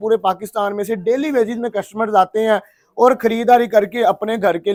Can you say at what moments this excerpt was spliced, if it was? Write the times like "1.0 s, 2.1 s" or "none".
none